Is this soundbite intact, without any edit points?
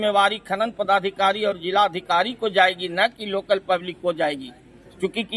yes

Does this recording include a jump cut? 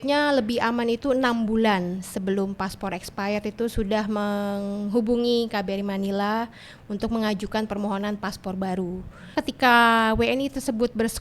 yes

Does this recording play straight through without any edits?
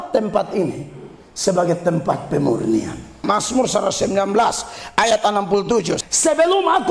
no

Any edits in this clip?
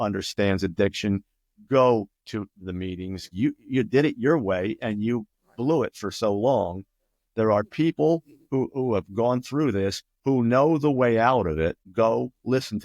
yes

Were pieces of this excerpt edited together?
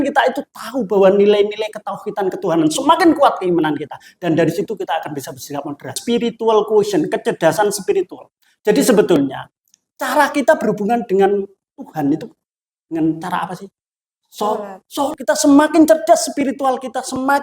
yes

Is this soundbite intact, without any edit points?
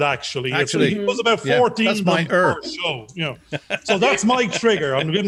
yes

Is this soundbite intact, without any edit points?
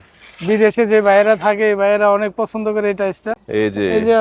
no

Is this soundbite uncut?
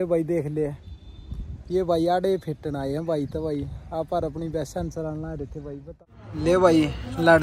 no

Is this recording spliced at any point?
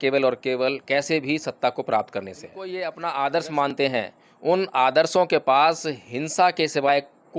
yes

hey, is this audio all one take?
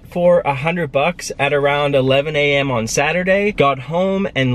no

